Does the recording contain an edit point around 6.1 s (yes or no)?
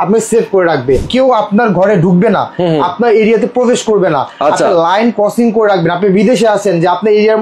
no